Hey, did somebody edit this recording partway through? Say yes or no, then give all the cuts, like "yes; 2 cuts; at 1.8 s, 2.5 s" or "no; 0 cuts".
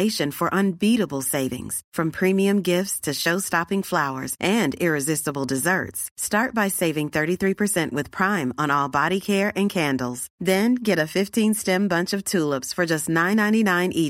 no; 0 cuts